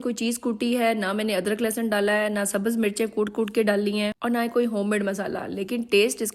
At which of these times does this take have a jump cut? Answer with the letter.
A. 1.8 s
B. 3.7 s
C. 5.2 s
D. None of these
D